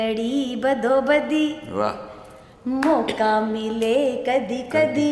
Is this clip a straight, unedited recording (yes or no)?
yes